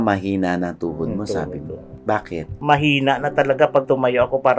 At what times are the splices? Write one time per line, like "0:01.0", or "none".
0:02.5